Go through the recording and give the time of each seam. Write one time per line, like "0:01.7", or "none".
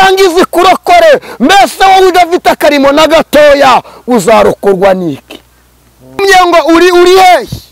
0:06.2